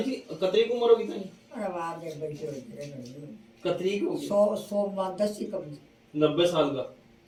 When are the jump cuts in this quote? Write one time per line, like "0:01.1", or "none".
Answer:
none